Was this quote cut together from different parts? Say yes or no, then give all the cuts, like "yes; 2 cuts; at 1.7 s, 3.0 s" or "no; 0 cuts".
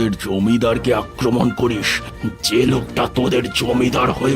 yes; 1 cut; at 2.0 s